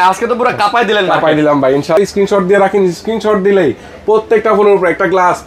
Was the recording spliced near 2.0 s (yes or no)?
yes